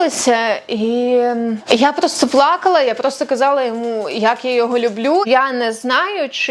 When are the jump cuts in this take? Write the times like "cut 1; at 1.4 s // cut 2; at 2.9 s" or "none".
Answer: cut 1; at 1.7 s // cut 2; at 5.3 s